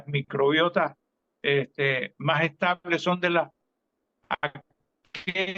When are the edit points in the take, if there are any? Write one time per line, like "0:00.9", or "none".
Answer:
none